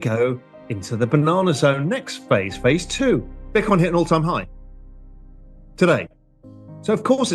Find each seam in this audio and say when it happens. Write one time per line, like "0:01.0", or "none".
0:03.4

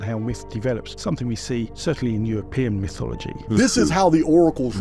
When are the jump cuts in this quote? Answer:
0:00.9
0:03.3

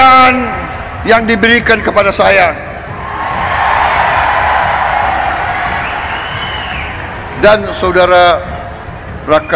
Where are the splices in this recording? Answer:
none

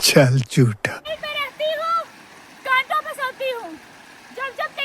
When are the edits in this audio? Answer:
0:01.0

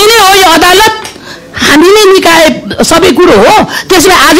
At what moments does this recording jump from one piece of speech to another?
none

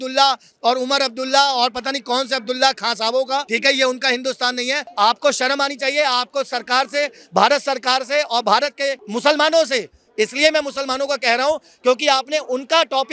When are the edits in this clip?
0:03.5
0:04.8
0:09.1

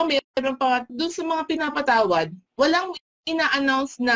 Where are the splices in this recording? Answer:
0:00.9
0:02.4

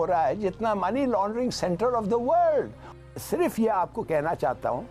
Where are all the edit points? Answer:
0:02.9

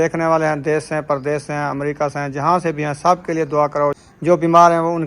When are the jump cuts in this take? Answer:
0:04.1

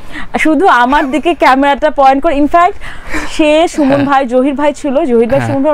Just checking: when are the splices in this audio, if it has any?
none

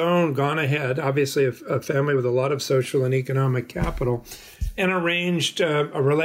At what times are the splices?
none

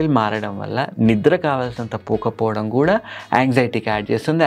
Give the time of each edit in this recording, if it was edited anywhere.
none

